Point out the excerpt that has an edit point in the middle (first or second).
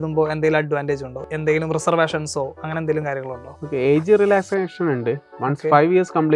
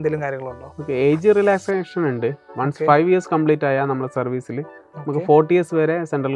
first